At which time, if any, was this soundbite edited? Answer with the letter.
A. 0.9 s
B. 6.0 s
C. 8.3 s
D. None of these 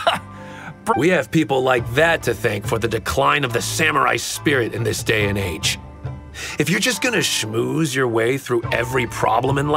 A